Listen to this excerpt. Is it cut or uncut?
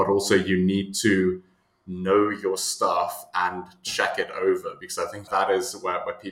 cut